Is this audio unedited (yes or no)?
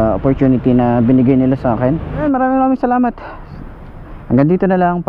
no